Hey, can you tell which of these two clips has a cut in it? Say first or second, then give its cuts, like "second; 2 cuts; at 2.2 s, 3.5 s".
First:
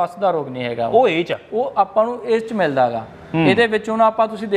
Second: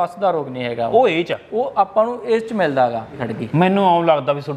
second; 1 cut; at 3.2 s